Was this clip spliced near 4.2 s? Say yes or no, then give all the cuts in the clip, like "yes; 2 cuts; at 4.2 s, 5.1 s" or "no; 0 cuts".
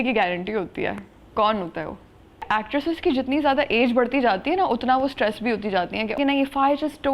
no; 2 cuts; at 2.5 s, 6.2 s